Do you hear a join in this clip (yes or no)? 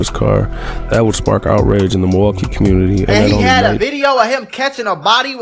no